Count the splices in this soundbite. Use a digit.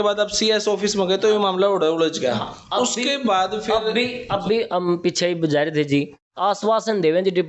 1